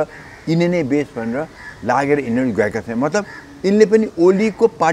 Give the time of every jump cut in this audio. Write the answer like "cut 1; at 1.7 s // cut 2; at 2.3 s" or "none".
none

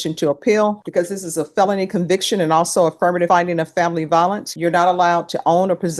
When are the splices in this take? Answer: cut 1; at 0.8 s // cut 2; at 3.3 s // cut 3; at 4.5 s

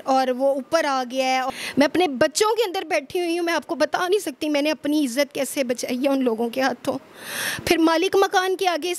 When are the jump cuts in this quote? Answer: cut 1; at 1.5 s

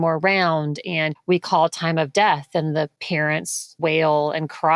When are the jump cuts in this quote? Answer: cut 1; at 1.1 s // cut 2; at 3.3 s

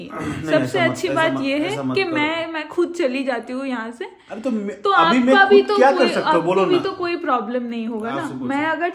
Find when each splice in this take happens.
none

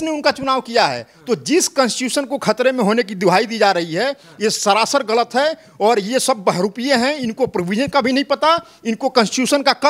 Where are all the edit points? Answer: none

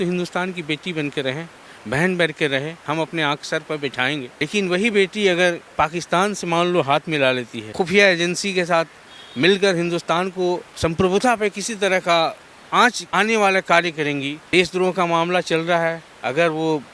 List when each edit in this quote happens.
cut 1; at 4.3 s // cut 2; at 7.6 s // cut 3; at 10.7 s // cut 4; at 13.0 s // cut 5; at 14.4 s

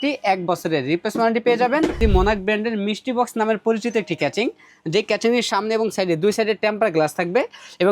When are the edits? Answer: cut 1; at 2.0 s

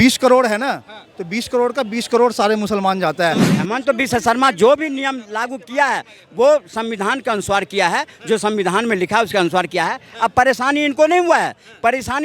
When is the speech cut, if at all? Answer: cut 1; at 3.5 s

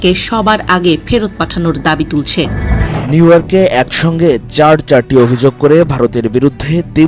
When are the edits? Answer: cut 1; at 3.0 s

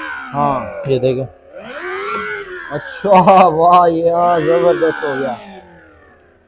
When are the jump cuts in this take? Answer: none

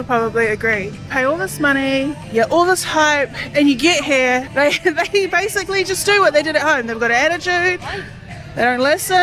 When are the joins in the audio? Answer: none

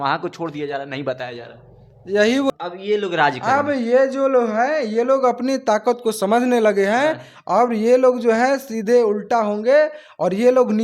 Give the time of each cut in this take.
cut 1; at 2.5 s

